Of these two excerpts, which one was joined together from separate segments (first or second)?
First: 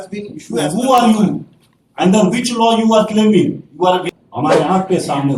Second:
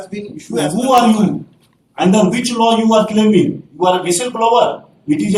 first